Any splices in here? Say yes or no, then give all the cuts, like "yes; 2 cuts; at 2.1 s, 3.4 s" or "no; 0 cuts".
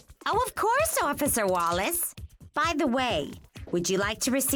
no; 0 cuts